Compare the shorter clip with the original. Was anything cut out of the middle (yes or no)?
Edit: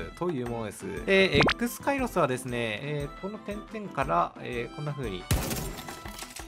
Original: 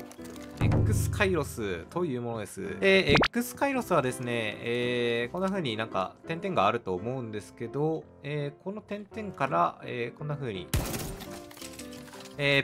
yes